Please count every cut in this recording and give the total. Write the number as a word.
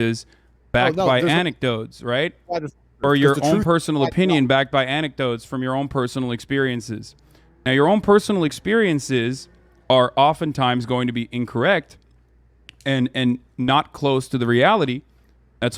one